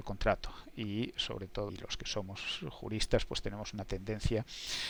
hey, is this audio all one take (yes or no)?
yes